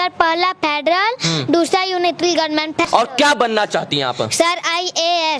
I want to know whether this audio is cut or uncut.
cut